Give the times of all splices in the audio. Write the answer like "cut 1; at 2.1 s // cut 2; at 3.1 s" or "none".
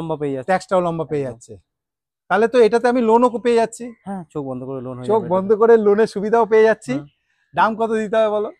none